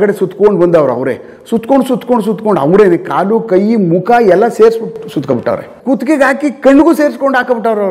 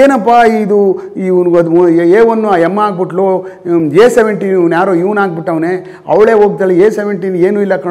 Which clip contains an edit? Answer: first; 1 cut; at 5.7 s

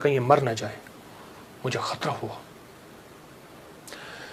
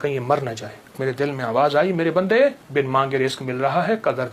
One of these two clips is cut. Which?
second; 2 cuts; at 1.0 s, 2.6 s

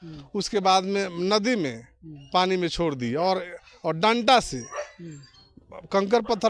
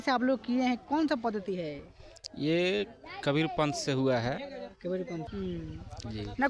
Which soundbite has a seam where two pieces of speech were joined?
second; 1 cut; at 5.3 s

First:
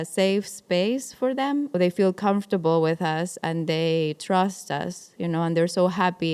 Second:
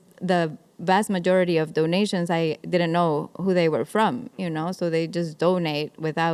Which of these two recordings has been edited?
first; 1 cut; at 1.7 s

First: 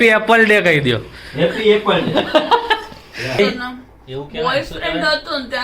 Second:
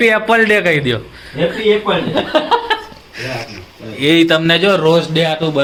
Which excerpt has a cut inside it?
first; 1 cut; at 3.4 s

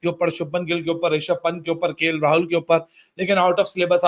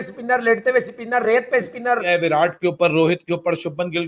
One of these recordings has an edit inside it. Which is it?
second; 1 cut; at 2.0 s

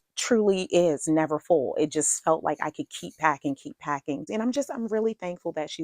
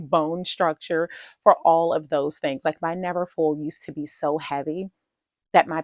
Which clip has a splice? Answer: first; 1 cut; at 4.3 s

